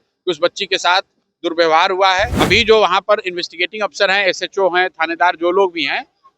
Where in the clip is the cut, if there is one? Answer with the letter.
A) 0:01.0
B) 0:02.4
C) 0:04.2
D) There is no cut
B